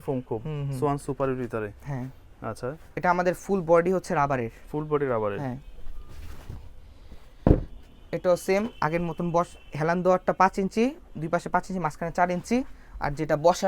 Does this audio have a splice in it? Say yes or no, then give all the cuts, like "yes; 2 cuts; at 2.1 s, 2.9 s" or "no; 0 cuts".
no; 0 cuts